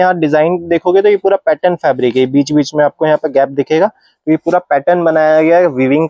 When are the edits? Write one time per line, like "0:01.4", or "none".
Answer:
none